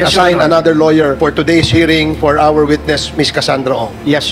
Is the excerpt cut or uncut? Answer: cut